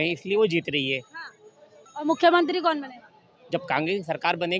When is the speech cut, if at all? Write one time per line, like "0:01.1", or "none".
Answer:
none